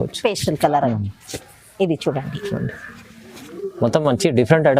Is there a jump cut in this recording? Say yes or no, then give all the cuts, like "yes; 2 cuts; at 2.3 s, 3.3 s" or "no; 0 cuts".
no; 0 cuts